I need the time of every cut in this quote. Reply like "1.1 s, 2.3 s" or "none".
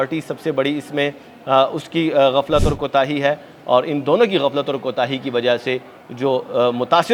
none